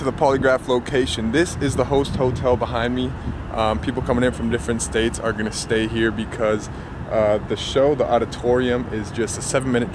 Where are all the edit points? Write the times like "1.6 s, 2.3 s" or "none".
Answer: none